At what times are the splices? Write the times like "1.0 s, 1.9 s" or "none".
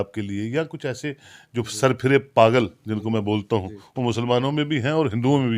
none